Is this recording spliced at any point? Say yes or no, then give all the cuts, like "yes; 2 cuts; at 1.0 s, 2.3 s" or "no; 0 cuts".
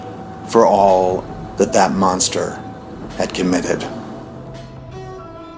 yes; 2 cuts; at 1.2 s, 4.1 s